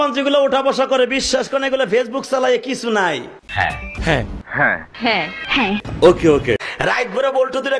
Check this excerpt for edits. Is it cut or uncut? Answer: uncut